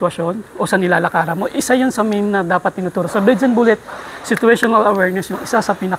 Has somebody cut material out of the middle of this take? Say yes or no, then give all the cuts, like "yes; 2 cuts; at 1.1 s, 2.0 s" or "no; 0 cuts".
no; 0 cuts